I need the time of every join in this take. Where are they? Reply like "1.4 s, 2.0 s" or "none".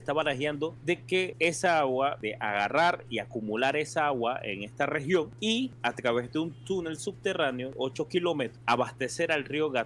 1.1 s, 2.3 s, 5.6 s, 7.7 s, 8.5 s